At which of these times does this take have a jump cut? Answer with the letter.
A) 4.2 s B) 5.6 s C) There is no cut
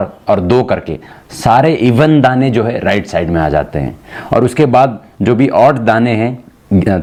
C